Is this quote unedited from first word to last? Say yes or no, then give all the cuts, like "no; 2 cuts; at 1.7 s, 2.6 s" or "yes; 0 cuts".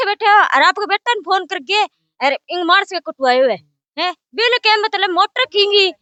yes; 0 cuts